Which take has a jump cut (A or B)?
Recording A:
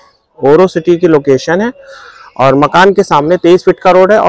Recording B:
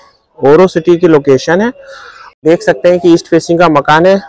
B